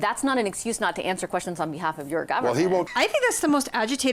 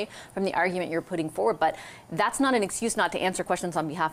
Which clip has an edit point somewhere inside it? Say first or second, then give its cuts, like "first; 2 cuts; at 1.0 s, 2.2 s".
first; 1 cut; at 2.9 s